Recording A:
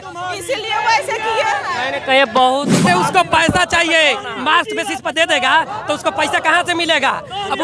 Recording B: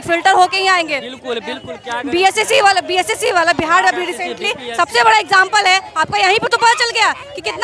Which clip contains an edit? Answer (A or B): A